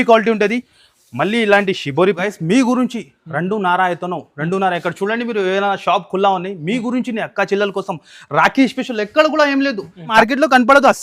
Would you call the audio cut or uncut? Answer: cut